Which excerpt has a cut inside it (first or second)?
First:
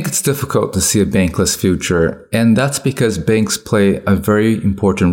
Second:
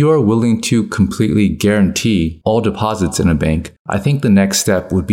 second